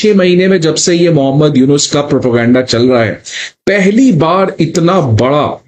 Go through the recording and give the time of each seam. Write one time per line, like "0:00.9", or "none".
none